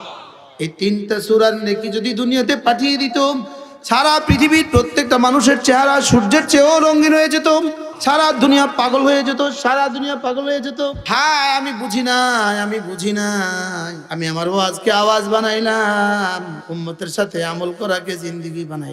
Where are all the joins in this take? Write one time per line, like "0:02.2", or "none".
0:07.9
0:11.0
0:14.0
0:16.6